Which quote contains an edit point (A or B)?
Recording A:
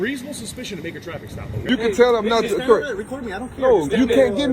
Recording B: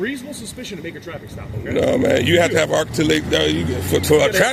A